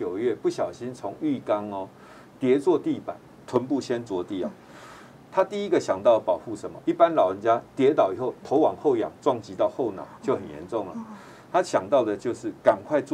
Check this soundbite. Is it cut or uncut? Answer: cut